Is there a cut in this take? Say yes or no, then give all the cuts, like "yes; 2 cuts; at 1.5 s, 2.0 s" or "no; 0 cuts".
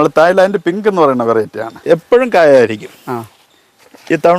yes; 1 cut; at 1.8 s